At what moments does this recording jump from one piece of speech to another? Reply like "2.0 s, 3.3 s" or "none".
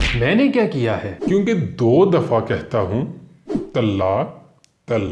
1.1 s